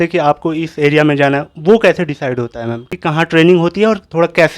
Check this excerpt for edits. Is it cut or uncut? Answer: cut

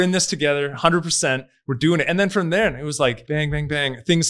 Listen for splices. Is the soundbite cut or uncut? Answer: cut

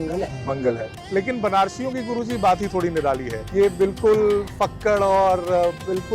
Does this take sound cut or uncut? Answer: cut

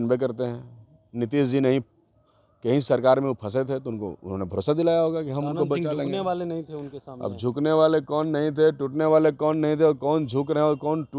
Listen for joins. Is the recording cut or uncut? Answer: uncut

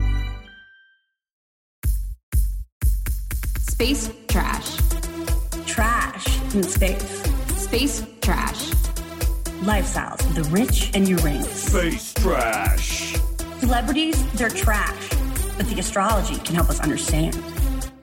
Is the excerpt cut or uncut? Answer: cut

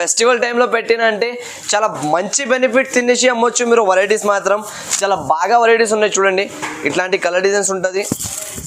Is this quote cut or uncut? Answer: uncut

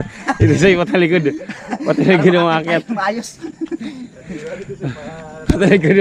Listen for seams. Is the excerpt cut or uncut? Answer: uncut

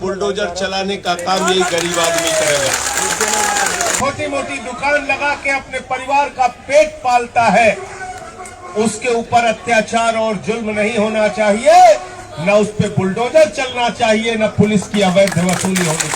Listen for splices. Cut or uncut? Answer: cut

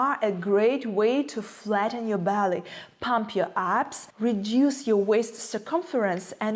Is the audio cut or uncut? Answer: uncut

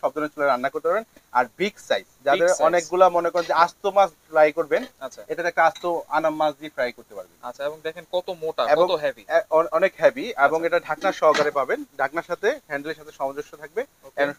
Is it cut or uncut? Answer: uncut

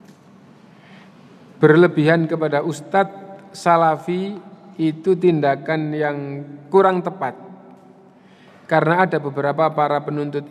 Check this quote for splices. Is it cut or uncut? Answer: uncut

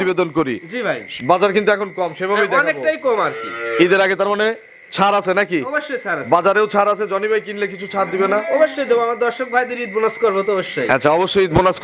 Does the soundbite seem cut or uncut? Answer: uncut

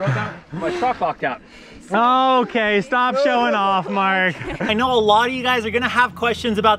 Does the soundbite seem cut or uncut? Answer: cut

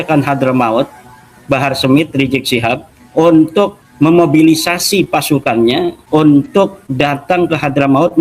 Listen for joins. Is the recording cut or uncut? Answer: cut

